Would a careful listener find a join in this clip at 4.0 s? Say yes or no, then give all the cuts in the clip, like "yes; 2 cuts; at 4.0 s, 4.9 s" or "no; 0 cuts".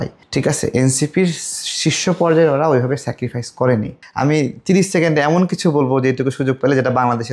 yes; 1 cut; at 4.0 s